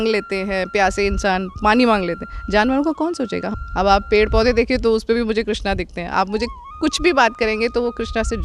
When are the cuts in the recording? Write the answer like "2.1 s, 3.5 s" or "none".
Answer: 3.5 s